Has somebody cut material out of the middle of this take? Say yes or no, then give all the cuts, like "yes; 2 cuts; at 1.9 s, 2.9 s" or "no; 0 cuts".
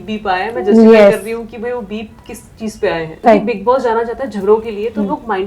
yes; 1 cut; at 3.1 s